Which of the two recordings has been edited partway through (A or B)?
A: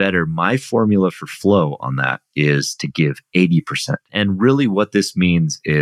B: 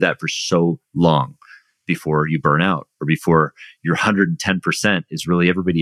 A